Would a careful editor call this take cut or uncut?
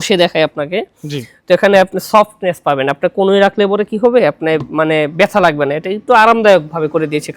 uncut